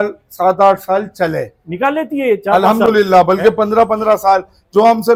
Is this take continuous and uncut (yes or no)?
yes